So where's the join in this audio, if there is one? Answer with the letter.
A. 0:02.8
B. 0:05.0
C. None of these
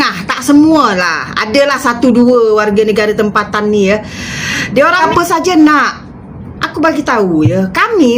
B